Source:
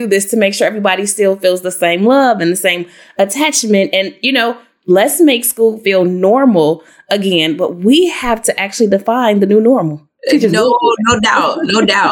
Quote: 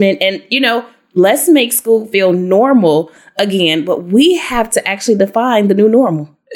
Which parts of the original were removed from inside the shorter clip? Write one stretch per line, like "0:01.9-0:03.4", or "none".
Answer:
none